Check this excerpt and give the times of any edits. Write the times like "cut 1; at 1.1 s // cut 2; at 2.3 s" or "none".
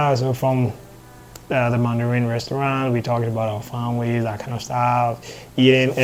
none